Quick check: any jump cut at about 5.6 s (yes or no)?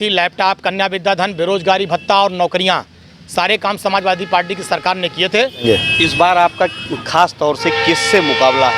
yes